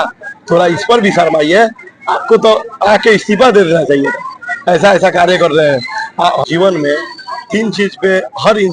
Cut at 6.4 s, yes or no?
yes